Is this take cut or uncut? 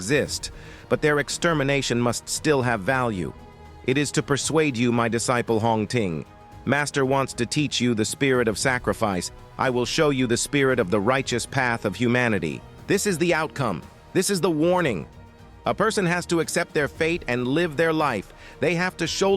cut